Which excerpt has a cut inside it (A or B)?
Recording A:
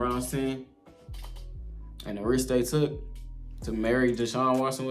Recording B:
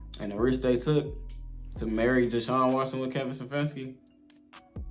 B